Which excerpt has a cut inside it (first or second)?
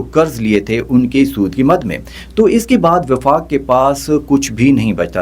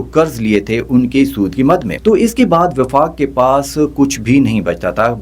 second